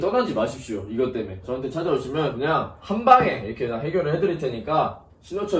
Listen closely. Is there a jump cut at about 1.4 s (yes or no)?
yes